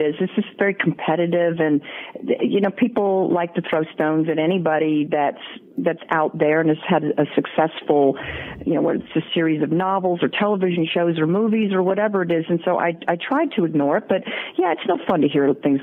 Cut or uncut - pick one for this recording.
uncut